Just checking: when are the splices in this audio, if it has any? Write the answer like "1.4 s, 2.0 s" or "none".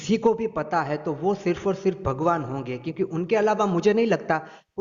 none